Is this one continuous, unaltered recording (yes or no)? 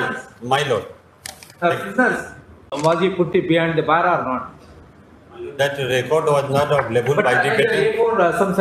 no